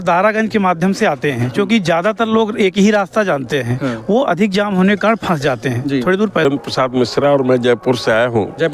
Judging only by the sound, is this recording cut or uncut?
cut